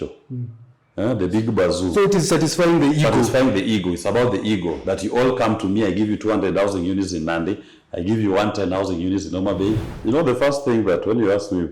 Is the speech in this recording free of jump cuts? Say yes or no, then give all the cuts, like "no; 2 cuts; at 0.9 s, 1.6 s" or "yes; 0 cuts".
no; 1 cut; at 9.9 s